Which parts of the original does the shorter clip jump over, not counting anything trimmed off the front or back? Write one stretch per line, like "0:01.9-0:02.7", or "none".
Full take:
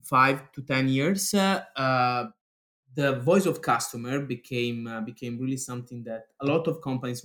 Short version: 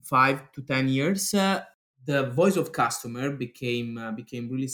0:01.7-0:02.6